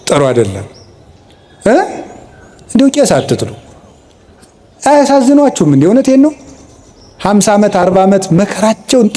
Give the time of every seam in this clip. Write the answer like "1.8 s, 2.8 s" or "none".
none